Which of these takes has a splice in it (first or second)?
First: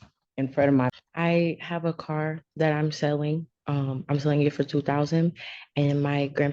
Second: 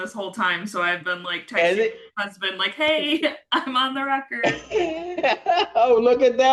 first